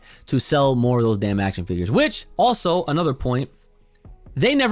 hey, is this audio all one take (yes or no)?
yes